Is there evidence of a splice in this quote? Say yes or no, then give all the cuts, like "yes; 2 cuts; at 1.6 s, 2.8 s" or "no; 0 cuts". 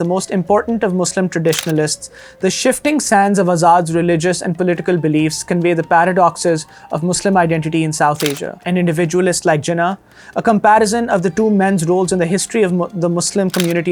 no; 0 cuts